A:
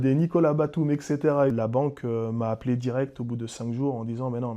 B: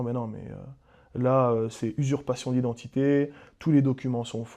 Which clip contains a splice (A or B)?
A